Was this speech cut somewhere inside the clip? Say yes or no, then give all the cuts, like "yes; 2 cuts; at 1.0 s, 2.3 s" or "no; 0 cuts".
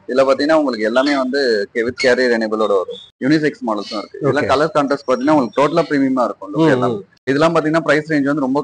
yes; 2 cuts; at 3.0 s, 7.1 s